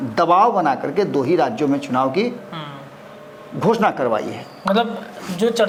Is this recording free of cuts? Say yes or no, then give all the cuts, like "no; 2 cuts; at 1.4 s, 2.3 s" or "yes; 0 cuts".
yes; 0 cuts